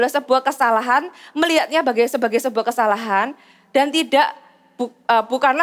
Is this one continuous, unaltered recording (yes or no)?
yes